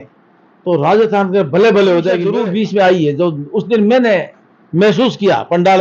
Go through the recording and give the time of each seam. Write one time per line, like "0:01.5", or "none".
0:02.3